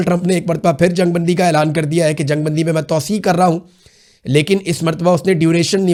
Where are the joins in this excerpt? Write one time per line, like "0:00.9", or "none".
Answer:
none